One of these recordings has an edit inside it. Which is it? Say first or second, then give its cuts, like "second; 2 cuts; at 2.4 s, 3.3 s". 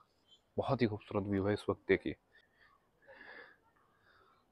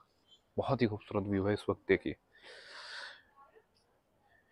first; 1 cut; at 2.3 s